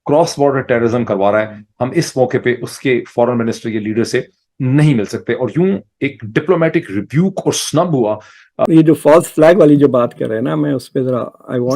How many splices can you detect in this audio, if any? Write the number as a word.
one